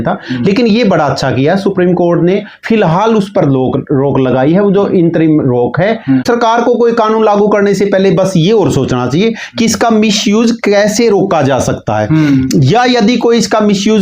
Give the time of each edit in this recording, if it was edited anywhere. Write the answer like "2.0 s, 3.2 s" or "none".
6.2 s